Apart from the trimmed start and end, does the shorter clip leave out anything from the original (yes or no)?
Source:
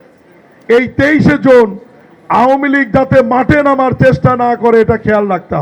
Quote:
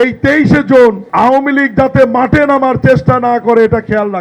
yes